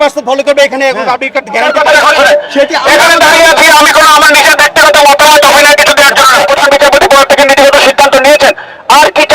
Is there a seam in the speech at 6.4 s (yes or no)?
yes